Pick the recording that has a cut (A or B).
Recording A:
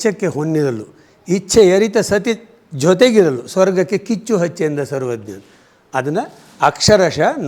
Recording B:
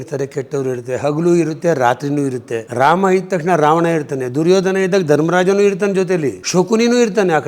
B